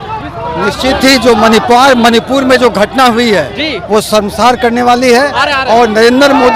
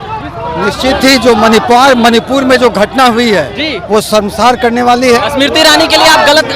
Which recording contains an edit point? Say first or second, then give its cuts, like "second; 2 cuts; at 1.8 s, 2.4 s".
second; 1 cut; at 5.2 s